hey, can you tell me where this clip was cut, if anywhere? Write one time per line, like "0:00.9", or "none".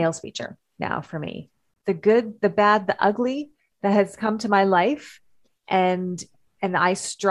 0:01.7